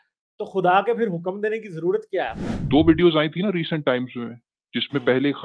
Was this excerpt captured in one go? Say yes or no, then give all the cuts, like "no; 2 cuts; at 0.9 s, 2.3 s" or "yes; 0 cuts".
no; 1 cut; at 2.4 s